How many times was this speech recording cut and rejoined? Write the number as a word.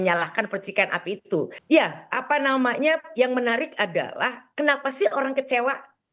one